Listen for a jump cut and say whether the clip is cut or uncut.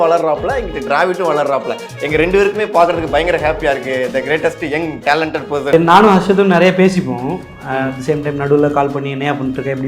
cut